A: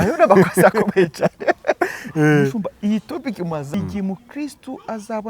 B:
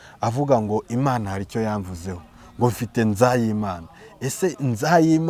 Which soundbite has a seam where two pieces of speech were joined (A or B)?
A